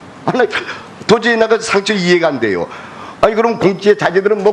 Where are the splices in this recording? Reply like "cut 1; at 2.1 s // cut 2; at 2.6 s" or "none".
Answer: none